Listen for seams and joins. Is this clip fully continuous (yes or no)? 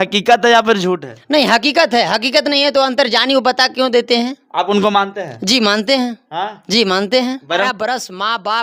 no